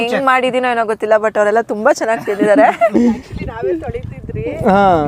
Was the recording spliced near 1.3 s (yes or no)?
no